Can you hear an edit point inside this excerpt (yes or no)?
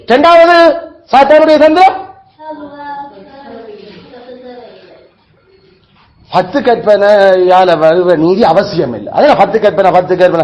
no